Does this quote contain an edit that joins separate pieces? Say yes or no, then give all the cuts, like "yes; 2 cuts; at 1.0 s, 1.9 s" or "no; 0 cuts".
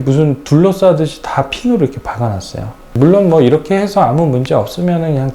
yes; 1 cut; at 3.0 s